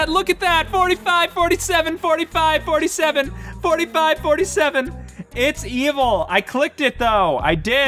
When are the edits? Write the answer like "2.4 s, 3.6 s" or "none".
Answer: none